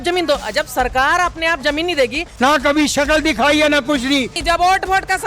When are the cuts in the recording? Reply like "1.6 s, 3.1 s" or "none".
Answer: 2.2 s, 4.4 s